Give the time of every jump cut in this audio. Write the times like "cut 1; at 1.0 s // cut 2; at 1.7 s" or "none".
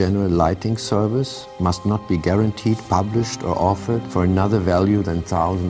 none